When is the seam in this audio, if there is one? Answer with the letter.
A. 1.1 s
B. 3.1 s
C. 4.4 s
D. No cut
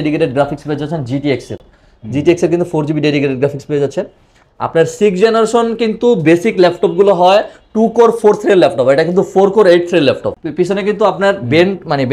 D